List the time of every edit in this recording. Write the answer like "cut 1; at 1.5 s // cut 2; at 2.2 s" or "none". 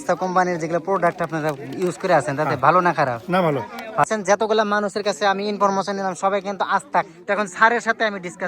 cut 1; at 4.0 s // cut 2; at 7.1 s